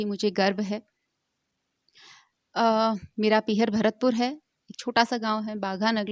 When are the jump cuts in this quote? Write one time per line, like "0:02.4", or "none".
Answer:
none